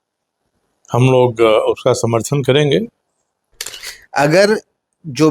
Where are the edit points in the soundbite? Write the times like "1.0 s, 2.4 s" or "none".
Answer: 3.7 s